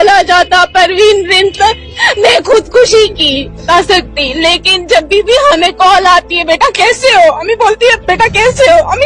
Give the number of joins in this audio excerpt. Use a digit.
1